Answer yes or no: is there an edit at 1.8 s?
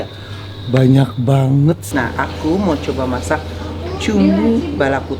yes